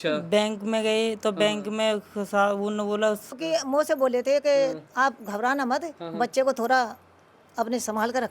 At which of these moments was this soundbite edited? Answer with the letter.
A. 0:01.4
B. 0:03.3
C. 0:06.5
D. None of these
B